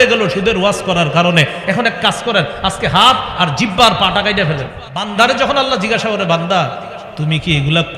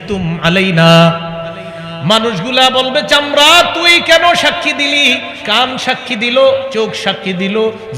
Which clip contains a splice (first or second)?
first